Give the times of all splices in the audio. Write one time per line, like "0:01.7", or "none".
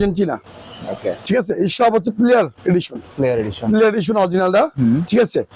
none